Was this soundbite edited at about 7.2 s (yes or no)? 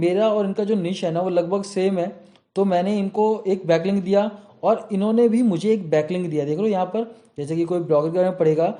no